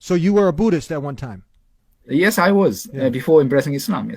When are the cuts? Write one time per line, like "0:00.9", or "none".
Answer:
none